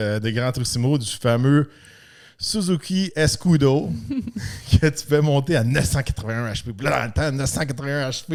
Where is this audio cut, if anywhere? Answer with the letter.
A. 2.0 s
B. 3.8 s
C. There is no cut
C